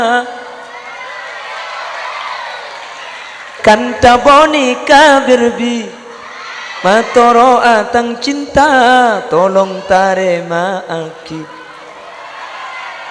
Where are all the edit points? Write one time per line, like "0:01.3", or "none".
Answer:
none